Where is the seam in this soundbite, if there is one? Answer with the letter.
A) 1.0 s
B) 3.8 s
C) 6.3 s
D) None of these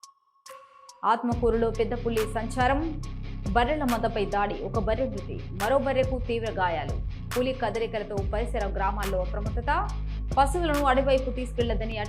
A